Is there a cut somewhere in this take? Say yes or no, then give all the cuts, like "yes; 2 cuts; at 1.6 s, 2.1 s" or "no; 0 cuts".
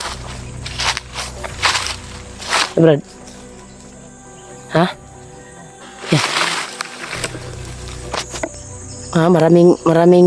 no; 0 cuts